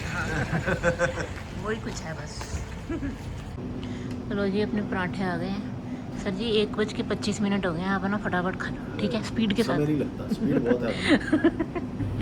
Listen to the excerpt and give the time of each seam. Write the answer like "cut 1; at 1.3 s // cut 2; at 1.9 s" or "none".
none